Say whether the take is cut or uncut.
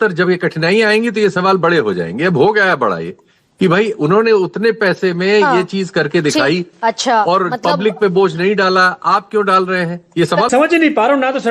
cut